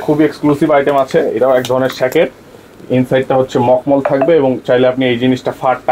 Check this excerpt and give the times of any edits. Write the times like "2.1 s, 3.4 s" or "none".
none